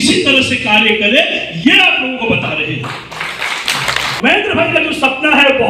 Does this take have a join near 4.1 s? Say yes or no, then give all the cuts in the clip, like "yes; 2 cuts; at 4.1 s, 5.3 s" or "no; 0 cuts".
yes; 1 cut; at 4.1 s